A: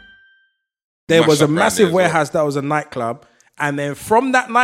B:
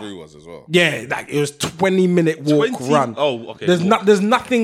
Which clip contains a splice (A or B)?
A